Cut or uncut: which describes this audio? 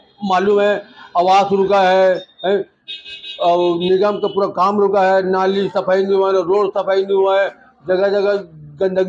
uncut